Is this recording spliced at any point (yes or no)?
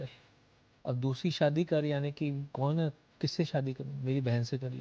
no